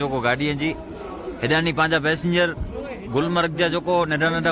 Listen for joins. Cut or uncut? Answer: uncut